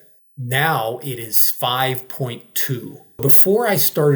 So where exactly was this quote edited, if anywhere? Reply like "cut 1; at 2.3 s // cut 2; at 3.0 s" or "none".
cut 1; at 3.0 s